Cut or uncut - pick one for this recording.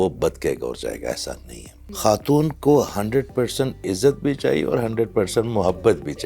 cut